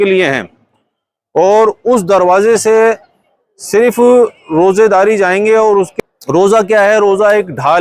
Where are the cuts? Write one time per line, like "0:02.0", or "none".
0:05.9